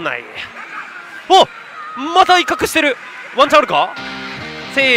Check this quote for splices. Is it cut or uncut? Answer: uncut